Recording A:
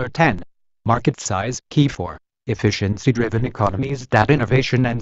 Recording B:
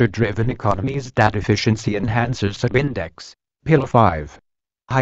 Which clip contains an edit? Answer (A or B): A